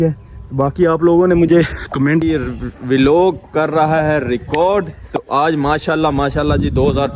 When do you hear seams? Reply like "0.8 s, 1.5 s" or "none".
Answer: 2.2 s